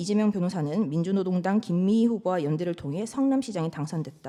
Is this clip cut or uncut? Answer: uncut